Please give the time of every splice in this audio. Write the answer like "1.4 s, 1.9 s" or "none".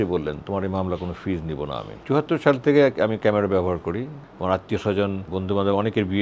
2.0 s, 4.2 s, 5.3 s